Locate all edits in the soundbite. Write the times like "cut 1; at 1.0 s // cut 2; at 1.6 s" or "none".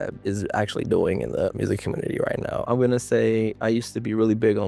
cut 1; at 2.6 s